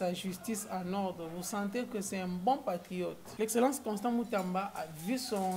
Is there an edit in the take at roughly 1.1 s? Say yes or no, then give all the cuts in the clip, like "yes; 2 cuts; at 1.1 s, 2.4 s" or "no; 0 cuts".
no; 1 cut; at 3.2 s